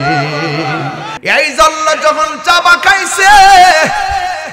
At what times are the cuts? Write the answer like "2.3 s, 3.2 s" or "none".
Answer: 1.1 s

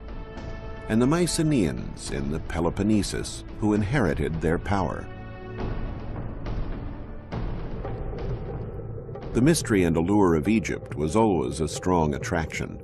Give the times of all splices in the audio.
7.9 s

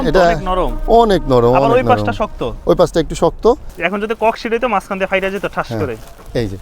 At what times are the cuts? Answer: 3.7 s

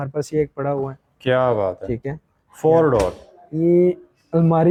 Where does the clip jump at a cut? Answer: none

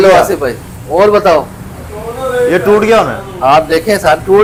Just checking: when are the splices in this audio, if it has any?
none

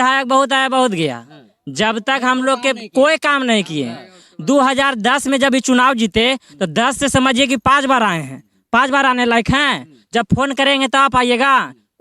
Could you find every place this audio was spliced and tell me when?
none

